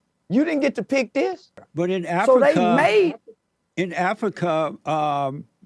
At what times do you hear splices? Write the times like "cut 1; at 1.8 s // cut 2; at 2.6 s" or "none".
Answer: cut 1; at 1.7 s